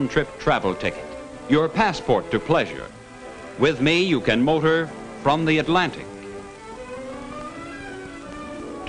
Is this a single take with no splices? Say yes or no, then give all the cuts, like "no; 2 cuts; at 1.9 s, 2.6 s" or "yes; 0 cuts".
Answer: yes; 0 cuts